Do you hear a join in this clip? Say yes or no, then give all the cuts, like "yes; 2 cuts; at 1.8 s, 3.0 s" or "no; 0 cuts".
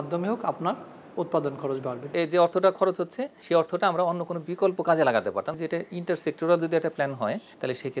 yes; 3 cuts; at 2.0 s, 3.3 s, 5.6 s